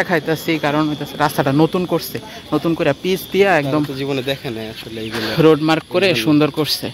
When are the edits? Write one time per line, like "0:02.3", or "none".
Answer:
none